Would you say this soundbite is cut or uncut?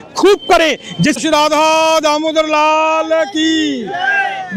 cut